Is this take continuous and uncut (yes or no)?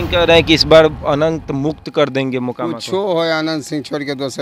yes